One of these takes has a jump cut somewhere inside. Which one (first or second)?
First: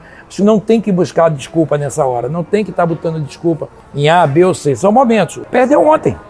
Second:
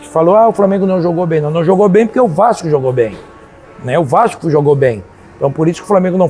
first